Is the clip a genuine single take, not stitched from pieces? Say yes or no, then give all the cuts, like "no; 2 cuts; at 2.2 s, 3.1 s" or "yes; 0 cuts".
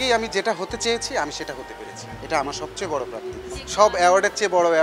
yes; 0 cuts